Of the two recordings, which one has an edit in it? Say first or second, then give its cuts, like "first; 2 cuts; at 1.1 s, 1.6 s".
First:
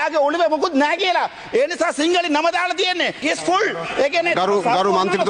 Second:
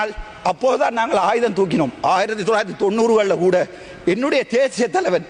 first; 1 cut; at 3.2 s